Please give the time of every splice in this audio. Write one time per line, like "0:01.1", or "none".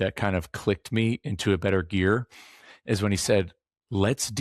none